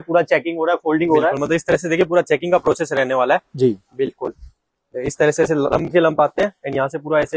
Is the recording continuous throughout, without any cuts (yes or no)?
yes